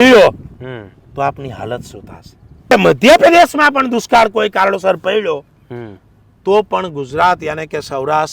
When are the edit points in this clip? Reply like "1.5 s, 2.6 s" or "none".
2.7 s